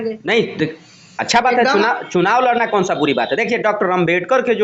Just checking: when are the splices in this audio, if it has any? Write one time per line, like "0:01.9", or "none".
none